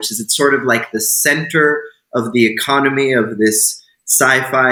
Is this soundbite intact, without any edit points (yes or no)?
yes